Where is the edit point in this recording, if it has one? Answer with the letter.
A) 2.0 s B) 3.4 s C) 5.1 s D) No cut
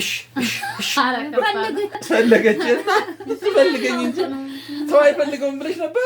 A